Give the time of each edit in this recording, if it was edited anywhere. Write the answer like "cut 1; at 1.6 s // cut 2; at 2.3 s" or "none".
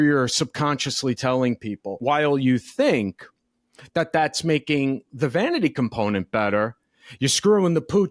cut 1; at 2.0 s

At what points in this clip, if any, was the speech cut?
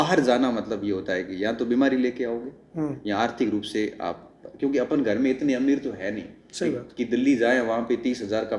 none

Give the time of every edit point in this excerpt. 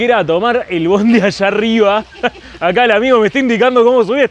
none

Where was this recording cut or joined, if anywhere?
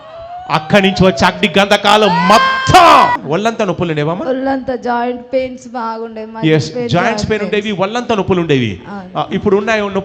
cut 1; at 3.1 s

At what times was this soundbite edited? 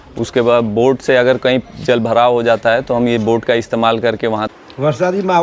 cut 1; at 4.5 s

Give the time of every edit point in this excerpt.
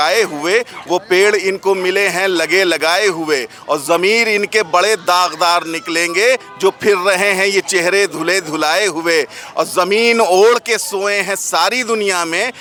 none

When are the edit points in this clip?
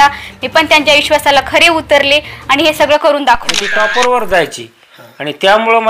cut 1; at 3.6 s

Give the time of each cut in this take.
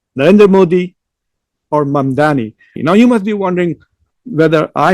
cut 1; at 2.8 s

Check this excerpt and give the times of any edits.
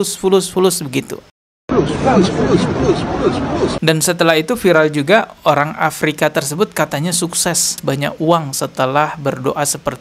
cut 1; at 3.8 s

